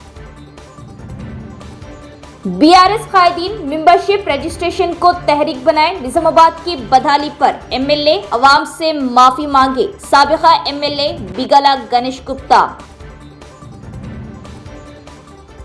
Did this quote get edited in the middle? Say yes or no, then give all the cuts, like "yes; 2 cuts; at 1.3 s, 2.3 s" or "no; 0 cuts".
yes; 1 cut; at 1.0 s